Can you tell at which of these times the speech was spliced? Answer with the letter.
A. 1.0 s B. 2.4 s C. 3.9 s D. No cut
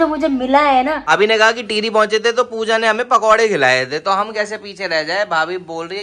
A